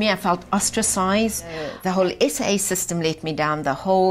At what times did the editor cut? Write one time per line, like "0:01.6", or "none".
0:01.7